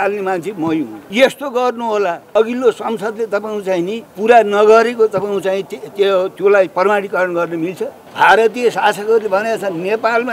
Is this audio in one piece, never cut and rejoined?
no; 4 cuts; at 1.0 s, 2.3 s, 4.0 s, 8.0 s

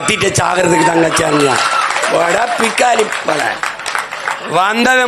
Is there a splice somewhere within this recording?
no; 0 cuts

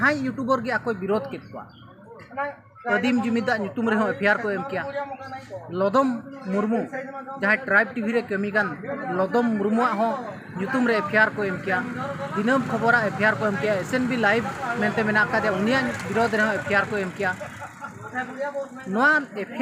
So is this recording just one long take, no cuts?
yes; 0 cuts

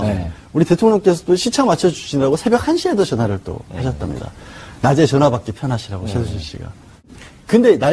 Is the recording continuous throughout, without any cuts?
no; 1 cut; at 6.0 s

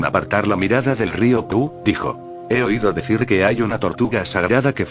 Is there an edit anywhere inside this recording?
yes; 1 cut; at 1.9 s

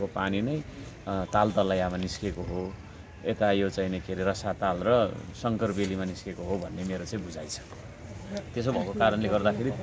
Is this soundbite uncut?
yes; 0 cuts

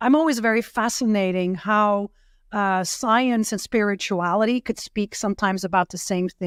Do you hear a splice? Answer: no; 0 cuts

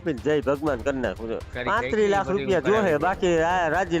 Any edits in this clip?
yes; 1 cut; at 1.5 s

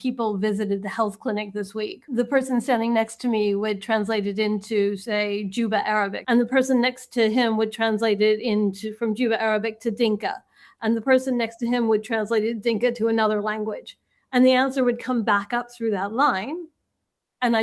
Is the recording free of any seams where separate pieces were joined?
no; 2 cuts; at 2.0 s, 6.2 s

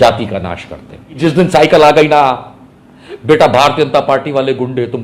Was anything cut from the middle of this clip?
yes; 1 cut; at 1.1 s

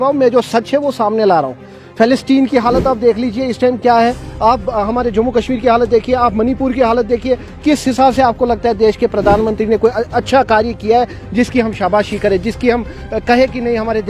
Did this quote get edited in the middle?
no; 0 cuts

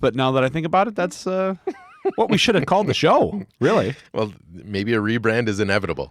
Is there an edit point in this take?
no; 0 cuts

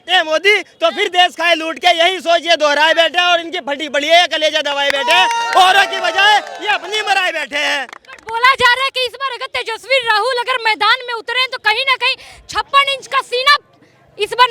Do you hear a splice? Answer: no; 0 cuts

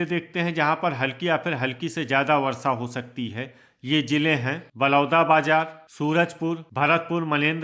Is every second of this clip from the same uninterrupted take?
no; 2 cuts; at 4.6 s, 6.2 s

